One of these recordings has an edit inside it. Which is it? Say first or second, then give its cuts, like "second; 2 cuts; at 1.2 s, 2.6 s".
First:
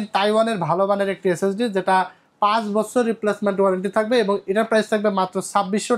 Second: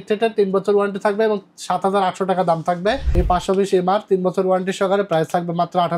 second; 1 cut; at 3.1 s